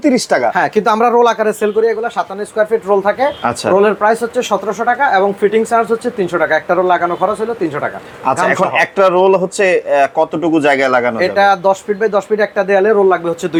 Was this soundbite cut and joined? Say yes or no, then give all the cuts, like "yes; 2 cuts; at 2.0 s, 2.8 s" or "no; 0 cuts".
no; 0 cuts